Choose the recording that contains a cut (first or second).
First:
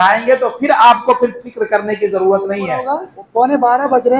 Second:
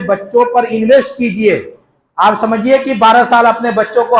first